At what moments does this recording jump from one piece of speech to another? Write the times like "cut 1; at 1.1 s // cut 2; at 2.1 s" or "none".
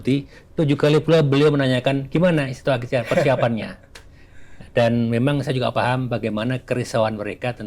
none

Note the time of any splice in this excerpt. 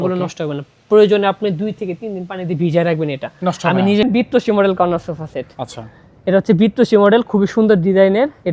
cut 1; at 4.0 s

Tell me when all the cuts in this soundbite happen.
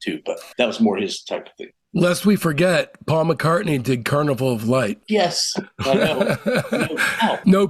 none

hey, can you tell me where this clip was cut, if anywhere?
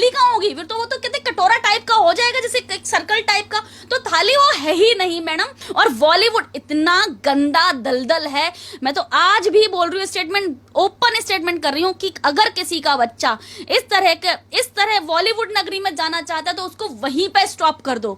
cut 1; at 5.6 s

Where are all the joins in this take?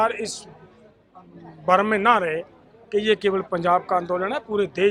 none

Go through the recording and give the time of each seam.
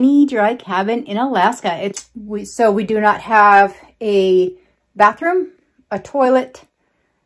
cut 1; at 1.9 s

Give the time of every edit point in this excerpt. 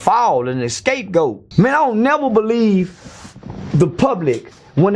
cut 1; at 1.4 s

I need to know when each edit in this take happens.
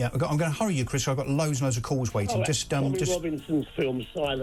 none

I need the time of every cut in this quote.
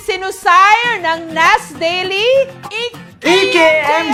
none

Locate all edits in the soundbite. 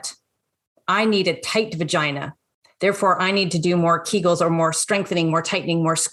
none

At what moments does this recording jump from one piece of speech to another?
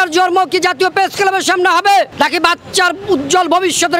none

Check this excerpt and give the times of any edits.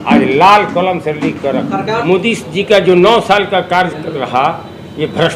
cut 1; at 2.0 s

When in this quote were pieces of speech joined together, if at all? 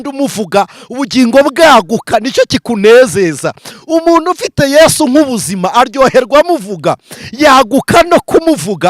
none

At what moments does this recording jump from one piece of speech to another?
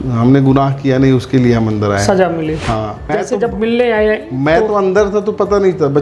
cut 1; at 3.1 s

